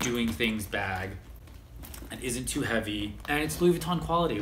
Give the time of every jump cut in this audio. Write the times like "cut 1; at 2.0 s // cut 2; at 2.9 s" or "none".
none